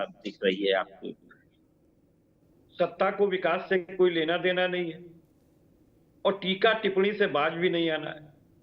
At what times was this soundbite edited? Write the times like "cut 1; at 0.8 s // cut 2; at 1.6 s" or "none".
cut 1; at 2.4 s